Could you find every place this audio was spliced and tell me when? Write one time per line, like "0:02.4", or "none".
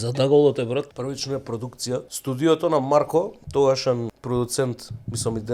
0:00.9
0:02.1
0:04.2